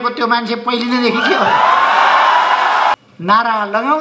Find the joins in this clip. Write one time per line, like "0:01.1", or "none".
0:03.0